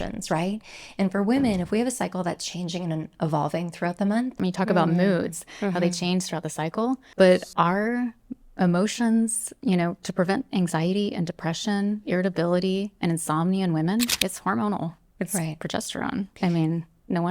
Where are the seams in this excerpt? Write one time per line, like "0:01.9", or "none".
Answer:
0:04.4
0:07.1
0:14.1
0:16.3